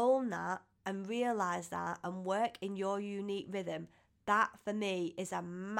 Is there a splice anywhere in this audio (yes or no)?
no